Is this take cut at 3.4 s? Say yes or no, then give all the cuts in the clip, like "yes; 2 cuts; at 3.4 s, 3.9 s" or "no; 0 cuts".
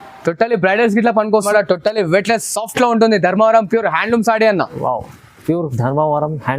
no; 1 cut; at 1.5 s